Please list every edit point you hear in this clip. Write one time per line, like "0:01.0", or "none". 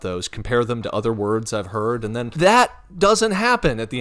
0:02.3